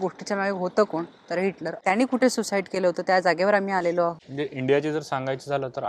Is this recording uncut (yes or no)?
no